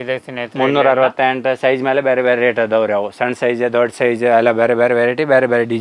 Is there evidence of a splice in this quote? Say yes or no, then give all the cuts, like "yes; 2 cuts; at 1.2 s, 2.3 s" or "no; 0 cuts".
no; 0 cuts